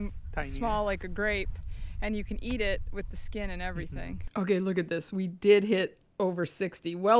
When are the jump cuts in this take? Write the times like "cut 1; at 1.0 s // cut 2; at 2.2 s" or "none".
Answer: cut 1; at 4.2 s

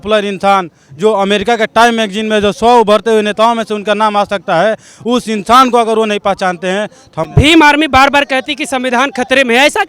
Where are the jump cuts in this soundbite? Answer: cut 1; at 7.3 s

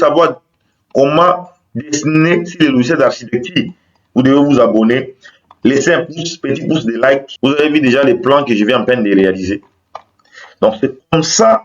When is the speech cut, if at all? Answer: cut 1; at 7.3 s

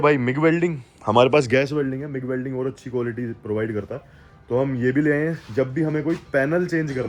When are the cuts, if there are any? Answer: none

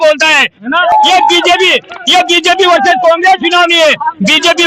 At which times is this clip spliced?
cut 1; at 0.9 s

